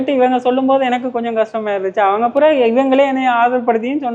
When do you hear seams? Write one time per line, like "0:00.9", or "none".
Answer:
none